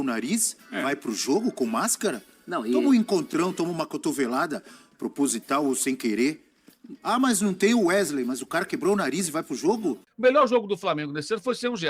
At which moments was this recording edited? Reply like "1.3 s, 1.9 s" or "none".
10.1 s